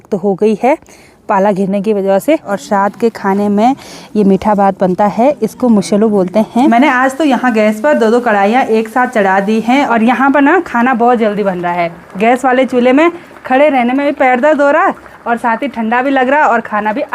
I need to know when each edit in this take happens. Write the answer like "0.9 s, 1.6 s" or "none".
2.6 s, 6.7 s, 9.9 s

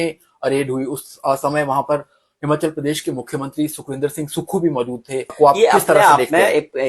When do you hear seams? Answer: 5.3 s

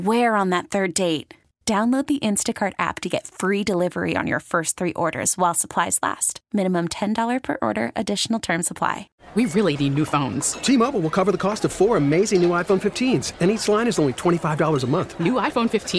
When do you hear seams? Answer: 9.1 s

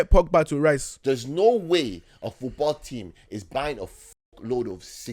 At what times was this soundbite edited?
0.9 s

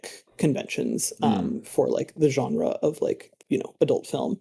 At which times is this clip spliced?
3.5 s

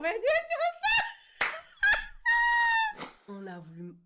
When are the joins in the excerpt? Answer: 3.1 s

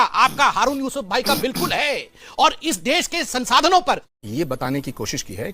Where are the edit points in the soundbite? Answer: 4.1 s

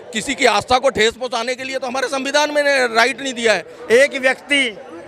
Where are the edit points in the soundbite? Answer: 3.8 s

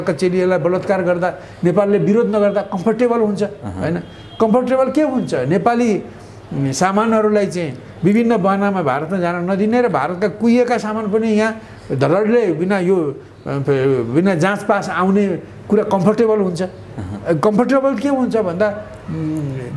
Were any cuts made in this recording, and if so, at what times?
none

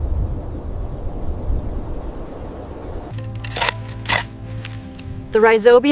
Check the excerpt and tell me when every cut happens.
3.0 s

